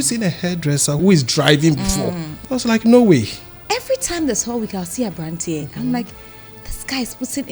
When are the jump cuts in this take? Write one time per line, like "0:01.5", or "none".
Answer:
0:01.0
0:02.3
0:03.6